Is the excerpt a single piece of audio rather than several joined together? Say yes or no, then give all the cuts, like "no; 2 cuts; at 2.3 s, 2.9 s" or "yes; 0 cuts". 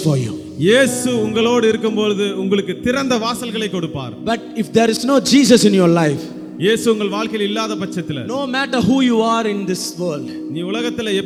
yes; 0 cuts